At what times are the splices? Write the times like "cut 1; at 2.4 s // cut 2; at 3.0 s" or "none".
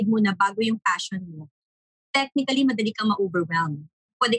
none